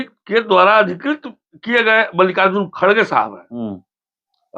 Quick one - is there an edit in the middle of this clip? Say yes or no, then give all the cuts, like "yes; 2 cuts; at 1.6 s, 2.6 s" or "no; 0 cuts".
no; 0 cuts